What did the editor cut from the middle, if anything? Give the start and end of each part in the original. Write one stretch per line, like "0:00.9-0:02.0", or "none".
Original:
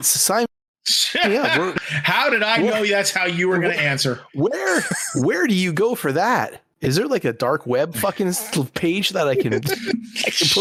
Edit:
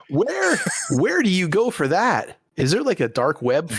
none